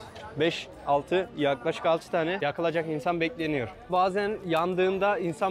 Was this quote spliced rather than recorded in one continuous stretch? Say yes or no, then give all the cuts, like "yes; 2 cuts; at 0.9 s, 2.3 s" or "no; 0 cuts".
yes; 2 cuts; at 2.4 s, 3.9 s